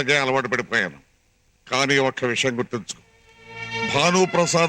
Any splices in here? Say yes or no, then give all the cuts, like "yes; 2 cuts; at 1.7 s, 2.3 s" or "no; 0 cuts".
no; 0 cuts